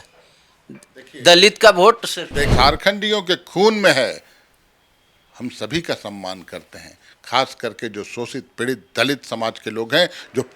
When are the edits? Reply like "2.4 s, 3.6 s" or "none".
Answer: 2.5 s

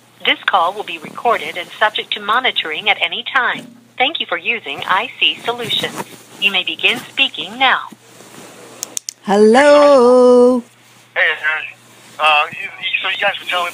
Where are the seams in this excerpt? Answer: 4.9 s

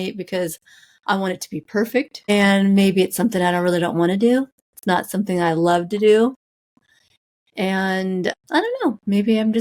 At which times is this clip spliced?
none

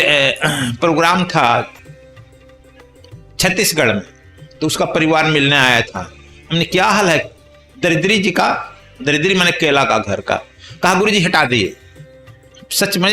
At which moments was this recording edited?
none

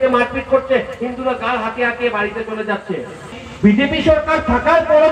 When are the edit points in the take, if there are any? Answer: 3.4 s

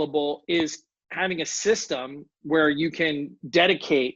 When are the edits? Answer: none

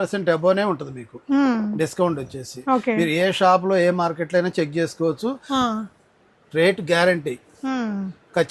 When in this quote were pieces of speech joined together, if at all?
none

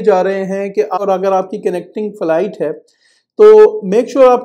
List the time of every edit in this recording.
1.0 s

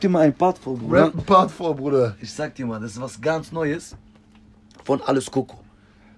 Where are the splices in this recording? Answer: none

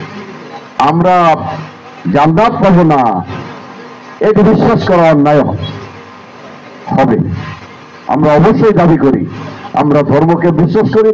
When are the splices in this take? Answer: none

